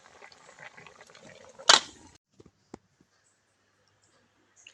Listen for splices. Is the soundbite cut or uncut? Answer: cut